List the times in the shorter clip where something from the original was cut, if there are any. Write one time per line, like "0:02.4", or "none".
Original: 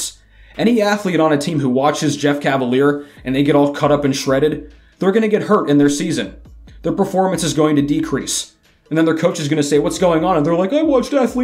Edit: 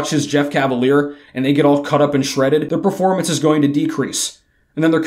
0:02.7